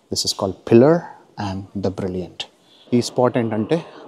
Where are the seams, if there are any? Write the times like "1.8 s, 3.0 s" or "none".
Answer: 2.7 s

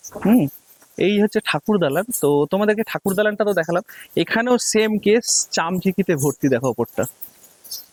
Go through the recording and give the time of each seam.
none

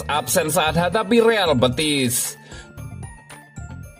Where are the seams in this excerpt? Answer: 2.8 s

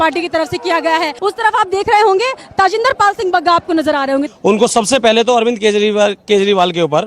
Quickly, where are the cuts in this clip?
1.1 s, 4.3 s

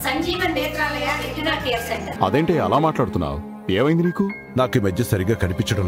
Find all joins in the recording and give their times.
2.1 s

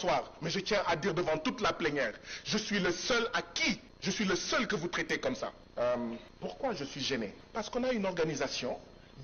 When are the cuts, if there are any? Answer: 3.9 s, 5.6 s, 6.3 s, 7.4 s

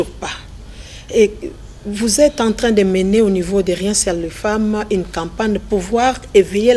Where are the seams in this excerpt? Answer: 5.6 s

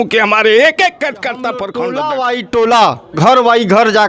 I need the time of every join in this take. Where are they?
1.6 s

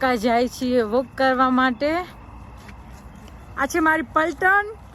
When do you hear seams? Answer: none

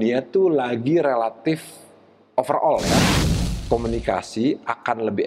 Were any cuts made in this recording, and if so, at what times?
3.3 s

